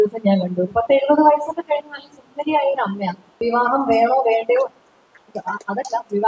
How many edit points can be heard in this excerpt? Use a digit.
1